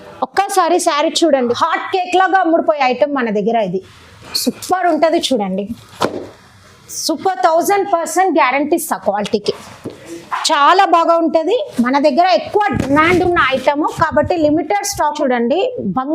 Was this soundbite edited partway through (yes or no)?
yes